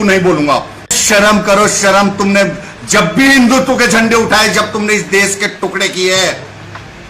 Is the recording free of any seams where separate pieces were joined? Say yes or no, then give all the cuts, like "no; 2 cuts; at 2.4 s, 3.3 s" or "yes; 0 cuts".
no; 1 cut; at 1.0 s